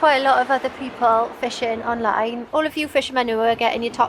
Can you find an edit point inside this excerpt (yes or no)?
yes